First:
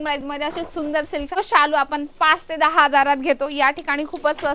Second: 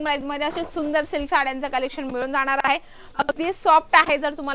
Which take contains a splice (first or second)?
first